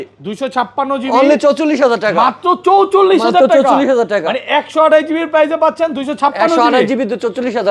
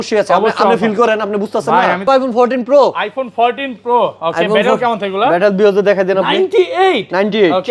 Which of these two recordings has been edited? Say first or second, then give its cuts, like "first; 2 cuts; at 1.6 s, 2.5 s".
second; 1 cut; at 2.0 s